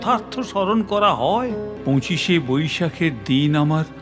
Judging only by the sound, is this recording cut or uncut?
cut